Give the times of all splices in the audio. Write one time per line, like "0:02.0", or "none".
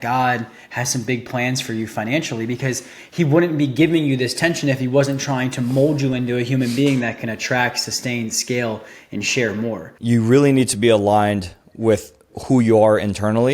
0:09.9